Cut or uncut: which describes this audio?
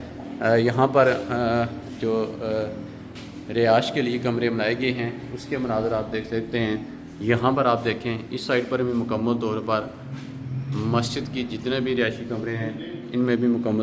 uncut